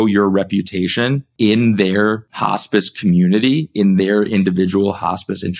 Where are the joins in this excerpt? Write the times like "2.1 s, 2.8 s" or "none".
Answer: 1.2 s, 2.3 s